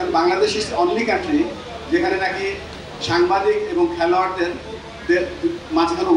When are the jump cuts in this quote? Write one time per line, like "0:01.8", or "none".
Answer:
none